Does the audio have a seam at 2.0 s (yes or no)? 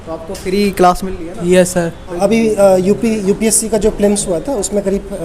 yes